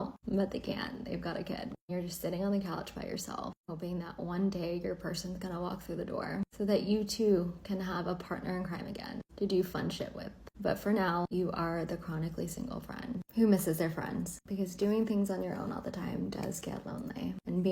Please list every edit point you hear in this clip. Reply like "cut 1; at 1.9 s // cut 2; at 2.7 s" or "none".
none

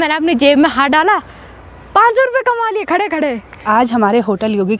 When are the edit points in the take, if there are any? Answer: cut 1; at 3.6 s

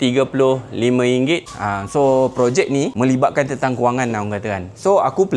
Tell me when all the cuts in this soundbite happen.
cut 1; at 1.5 s

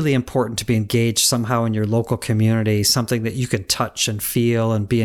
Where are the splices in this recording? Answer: none

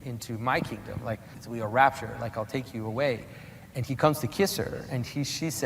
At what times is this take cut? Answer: cut 1; at 1.4 s

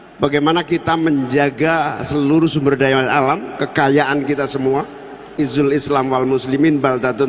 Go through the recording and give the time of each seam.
cut 1; at 5.3 s

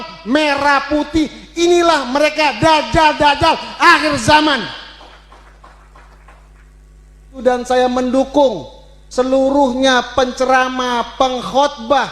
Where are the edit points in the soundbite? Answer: cut 1; at 7.4 s

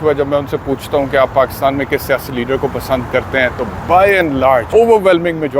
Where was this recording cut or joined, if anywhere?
cut 1; at 4.7 s

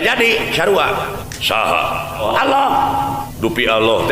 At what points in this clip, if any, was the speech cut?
cut 1; at 1.3 s // cut 2; at 2.2 s // cut 3; at 3.3 s

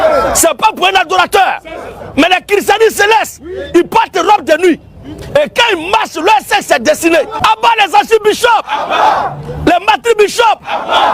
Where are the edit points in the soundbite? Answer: cut 1; at 7.3 s

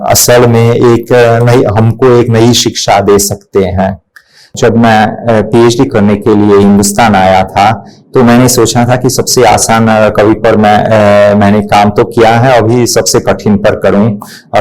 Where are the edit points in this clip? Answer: cut 1; at 4.5 s

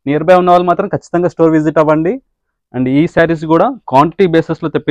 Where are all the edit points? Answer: none

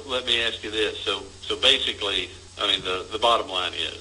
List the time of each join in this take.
none

